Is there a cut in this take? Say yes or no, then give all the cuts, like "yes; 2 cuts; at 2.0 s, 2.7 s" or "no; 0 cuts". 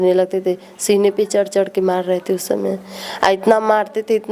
no; 0 cuts